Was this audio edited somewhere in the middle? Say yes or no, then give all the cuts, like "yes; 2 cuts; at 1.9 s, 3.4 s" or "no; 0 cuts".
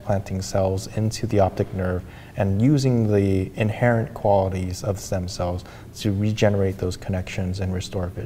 no; 0 cuts